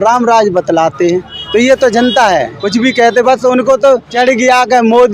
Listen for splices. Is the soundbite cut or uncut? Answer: cut